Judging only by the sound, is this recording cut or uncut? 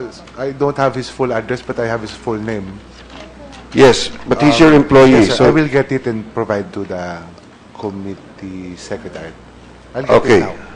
cut